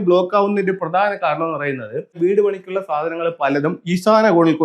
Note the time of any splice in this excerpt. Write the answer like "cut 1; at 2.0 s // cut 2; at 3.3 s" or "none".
cut 1; at 2.2 s